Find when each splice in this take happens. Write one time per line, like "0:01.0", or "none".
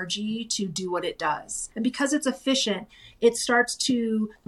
0:01.6